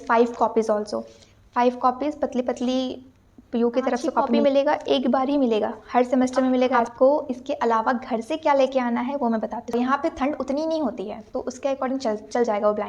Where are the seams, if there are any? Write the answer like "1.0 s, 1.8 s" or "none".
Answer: 4.4 s, 6.8 s, 9.7 s